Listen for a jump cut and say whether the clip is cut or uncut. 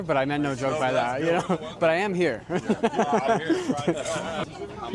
uncut